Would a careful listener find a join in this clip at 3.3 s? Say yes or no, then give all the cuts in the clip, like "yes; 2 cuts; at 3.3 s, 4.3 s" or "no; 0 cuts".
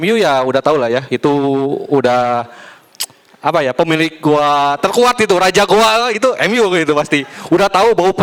no; 0 cuts